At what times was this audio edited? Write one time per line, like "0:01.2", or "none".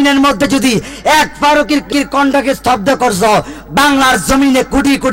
0:01.9